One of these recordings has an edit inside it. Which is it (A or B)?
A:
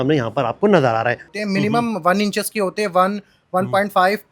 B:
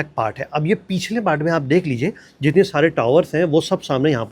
A